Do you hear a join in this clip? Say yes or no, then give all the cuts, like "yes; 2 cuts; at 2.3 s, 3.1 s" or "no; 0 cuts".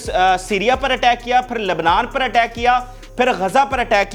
no; 0 cuts